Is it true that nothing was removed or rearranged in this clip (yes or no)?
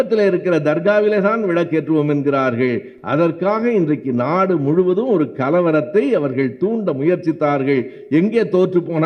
yes